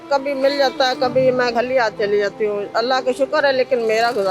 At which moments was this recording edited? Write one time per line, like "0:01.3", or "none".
0:01.5